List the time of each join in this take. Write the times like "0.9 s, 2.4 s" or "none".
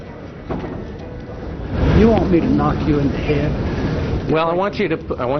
none